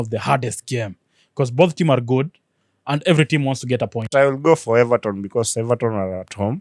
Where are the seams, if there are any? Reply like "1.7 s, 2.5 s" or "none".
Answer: 4.1 s